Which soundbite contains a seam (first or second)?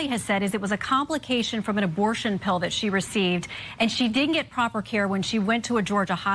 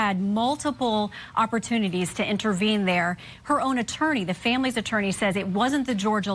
first